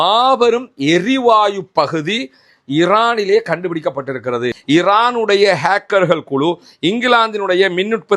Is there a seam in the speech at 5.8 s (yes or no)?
no